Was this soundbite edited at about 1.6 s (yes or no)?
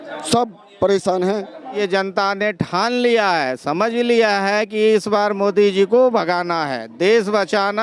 yes